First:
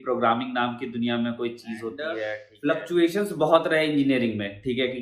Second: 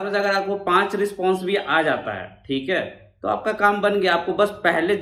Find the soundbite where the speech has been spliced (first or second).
first